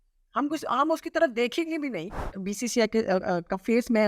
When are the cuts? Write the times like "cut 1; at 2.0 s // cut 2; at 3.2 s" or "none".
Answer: cut 1; at 2.4 s